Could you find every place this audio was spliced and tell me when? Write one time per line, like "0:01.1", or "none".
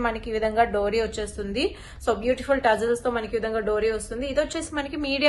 none